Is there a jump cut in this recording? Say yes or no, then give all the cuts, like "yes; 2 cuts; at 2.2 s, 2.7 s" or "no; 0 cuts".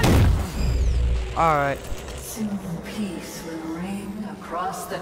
no; 0 cuts